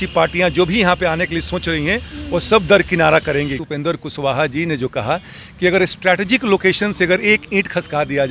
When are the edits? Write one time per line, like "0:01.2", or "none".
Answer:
0:03.6

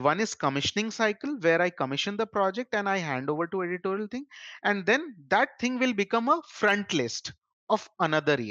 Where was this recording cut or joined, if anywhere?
none

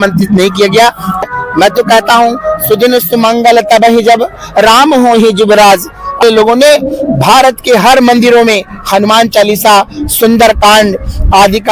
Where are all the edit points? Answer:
0:01.2
0:06.2

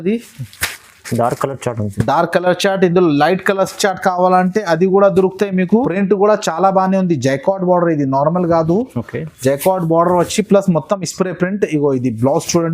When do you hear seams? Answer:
0:05.9

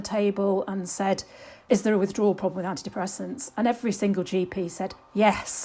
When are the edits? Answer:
none

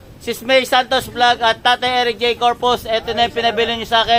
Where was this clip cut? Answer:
none

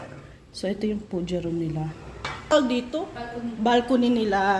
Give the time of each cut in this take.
0:02.5

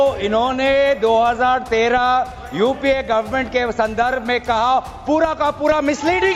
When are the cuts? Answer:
none

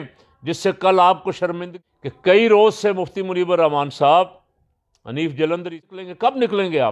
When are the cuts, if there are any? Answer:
0:01.7
0:05.8

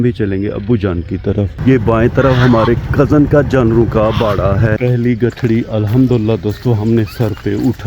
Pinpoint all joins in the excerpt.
0:01.5
0:04.8

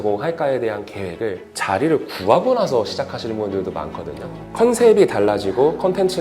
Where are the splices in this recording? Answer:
0:04.4

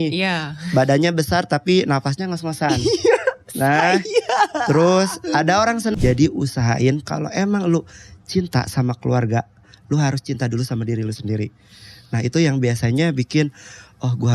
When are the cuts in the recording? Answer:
0:05.9

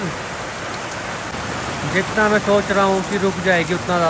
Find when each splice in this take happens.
0:01.3

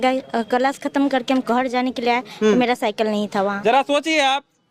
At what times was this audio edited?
none

